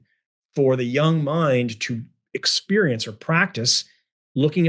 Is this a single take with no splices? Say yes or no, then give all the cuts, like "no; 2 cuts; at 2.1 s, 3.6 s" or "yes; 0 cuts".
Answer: yes; 0 cuts